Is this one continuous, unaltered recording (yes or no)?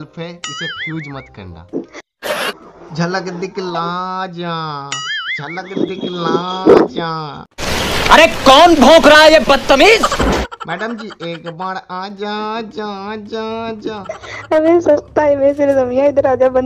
no